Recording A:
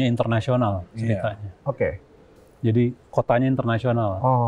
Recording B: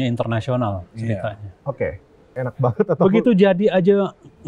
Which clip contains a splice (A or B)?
B